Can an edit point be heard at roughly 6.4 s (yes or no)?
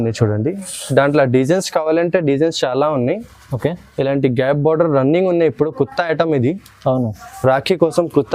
no